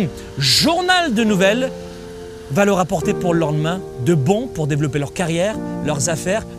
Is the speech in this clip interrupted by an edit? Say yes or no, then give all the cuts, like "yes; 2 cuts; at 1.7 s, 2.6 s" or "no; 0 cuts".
no; 0 cuts